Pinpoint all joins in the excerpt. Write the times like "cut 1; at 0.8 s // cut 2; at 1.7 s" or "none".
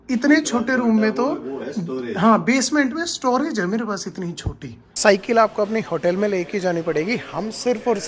cut 1; at 5.0 s